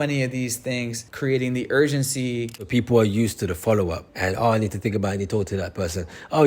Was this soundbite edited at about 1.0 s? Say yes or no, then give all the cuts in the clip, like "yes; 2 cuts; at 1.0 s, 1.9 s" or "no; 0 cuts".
yes; 3 cuts; at 1.0 s, 2.7 s, 4.1 s